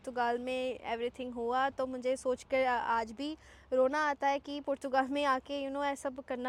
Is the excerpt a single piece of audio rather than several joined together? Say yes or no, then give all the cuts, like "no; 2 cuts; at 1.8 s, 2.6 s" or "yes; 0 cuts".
yes; 0 cuts